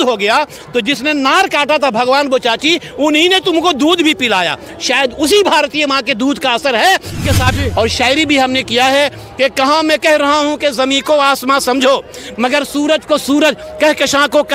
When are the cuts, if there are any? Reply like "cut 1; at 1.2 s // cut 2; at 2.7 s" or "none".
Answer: cut 1; at 7.5 s